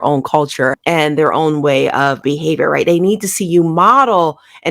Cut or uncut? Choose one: cut